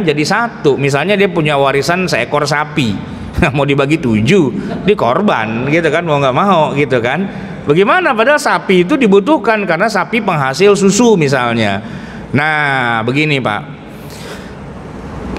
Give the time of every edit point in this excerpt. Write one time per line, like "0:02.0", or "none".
none

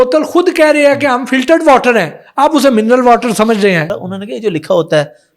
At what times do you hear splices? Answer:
0:03.9

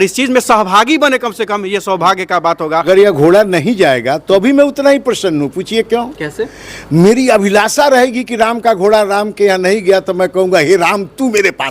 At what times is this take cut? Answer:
0:02.9

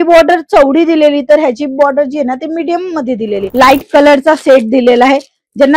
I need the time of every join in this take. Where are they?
0:03.4

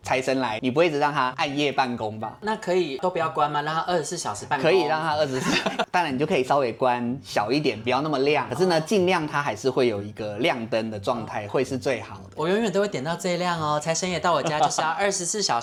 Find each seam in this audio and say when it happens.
none

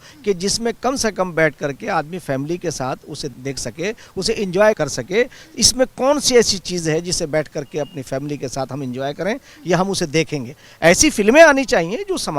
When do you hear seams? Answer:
0:03.3
0:04.8
0:10.6

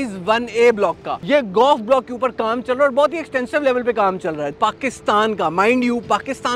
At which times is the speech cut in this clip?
0:01.1
0:04.5

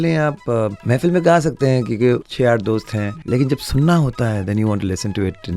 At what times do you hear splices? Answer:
0:00.8
0:02.3
0:03.1

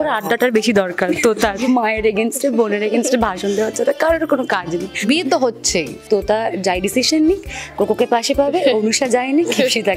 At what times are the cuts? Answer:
0:01.6
0:05.0
0:06.0

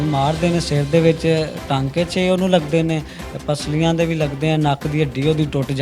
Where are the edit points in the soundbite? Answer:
none

